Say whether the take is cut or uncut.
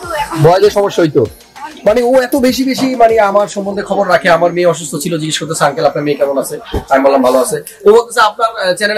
uncut